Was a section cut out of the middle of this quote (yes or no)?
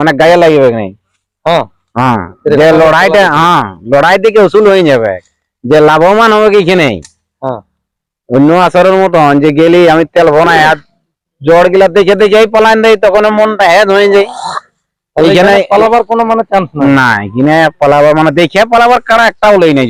no